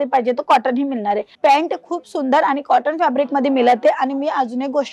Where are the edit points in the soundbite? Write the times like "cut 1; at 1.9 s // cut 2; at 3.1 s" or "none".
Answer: cut 1; at 1.3 s